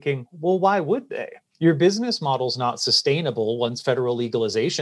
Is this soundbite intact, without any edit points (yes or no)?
yes